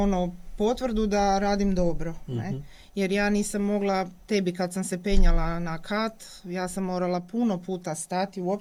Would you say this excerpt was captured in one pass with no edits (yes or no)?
yes